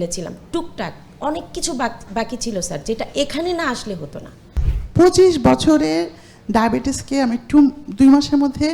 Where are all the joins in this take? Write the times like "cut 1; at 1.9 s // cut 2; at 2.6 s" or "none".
cut 1; at 4.5 s